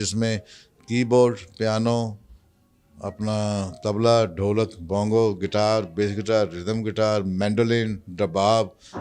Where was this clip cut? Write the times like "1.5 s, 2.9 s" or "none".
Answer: none